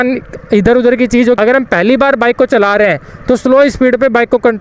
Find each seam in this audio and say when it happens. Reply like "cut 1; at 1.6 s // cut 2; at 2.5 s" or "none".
cut 1; at 1.4 s